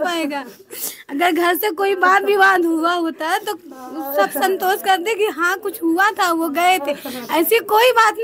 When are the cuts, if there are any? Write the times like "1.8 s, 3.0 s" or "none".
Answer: none